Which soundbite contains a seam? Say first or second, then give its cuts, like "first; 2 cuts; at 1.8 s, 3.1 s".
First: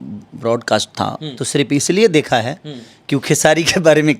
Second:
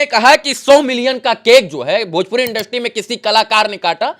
first; 1 cut; at 1.4 s